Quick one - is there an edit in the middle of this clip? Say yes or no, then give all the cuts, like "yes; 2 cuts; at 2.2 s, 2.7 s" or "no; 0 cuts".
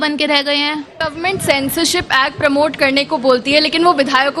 yes; 1 cut; at 0.9 s